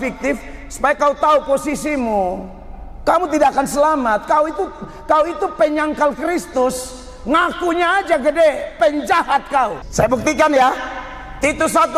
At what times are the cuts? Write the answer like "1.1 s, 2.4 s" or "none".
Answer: 9.8 s